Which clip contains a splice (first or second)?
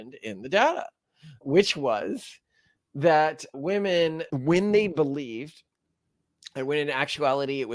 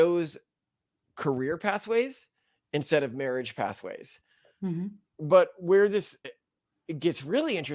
second